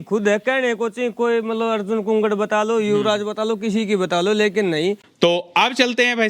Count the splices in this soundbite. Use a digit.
1